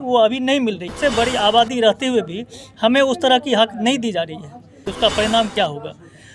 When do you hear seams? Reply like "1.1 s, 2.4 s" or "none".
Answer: 1.0 s, 4.9 s